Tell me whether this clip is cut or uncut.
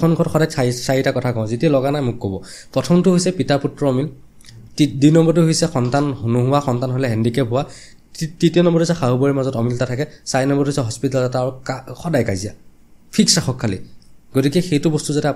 uncut